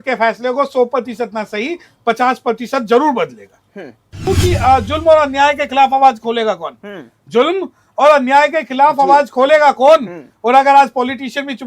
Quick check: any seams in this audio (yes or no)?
yes